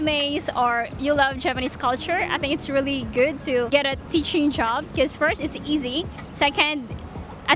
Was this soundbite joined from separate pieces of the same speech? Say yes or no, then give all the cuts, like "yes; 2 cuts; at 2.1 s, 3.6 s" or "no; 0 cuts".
yes; 1 cut; at 3.7 s